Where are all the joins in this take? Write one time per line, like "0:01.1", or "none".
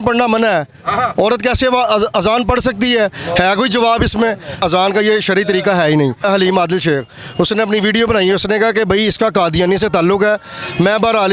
0:04.6
0:06.2